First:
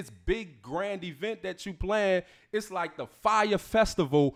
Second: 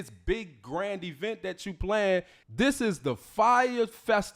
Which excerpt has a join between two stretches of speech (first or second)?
second